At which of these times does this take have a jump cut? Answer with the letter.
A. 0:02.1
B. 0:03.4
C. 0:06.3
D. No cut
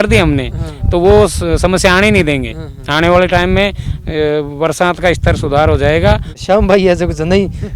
C